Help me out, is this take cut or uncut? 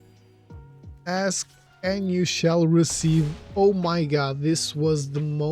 cut